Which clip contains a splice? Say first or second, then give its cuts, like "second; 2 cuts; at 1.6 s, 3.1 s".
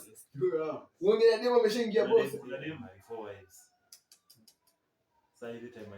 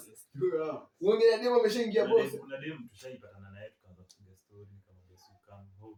first; 1 cut; at 2.9 s